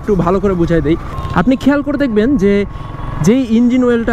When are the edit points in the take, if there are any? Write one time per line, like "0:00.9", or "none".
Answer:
0:01.1